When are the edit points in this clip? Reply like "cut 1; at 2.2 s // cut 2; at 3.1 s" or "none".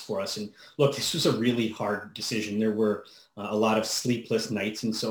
none